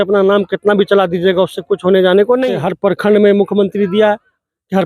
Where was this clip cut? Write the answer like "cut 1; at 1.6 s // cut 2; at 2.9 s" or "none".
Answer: cut 1; at 2.6 s